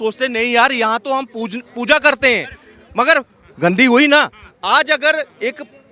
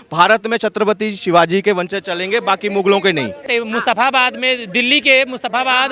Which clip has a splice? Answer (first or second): second